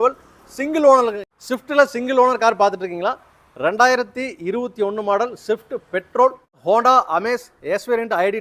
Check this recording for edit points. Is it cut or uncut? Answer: cut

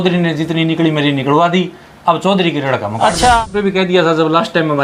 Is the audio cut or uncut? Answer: cut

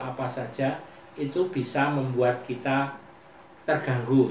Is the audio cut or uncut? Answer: uncut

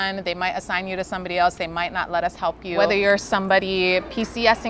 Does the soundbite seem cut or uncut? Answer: uncut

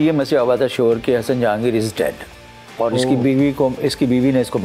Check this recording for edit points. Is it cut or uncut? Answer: uncut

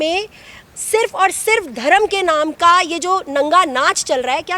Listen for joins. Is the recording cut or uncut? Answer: uncut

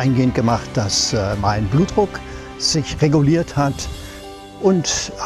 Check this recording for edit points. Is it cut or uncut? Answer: cut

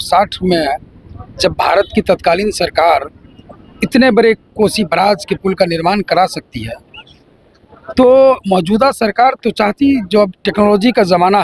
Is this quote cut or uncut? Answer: uncut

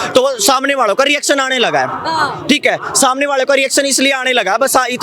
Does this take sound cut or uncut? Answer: uncut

